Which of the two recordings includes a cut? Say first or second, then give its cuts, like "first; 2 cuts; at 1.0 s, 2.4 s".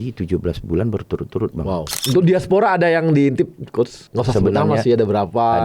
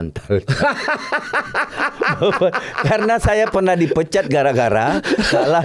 first; 2 cuts; at 2.0 s, 4.1 s